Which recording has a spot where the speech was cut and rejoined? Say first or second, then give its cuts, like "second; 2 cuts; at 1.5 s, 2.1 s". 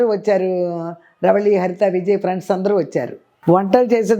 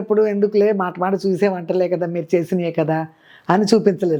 first; 1 cut; at 3.3 s